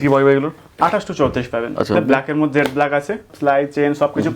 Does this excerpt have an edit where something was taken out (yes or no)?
yes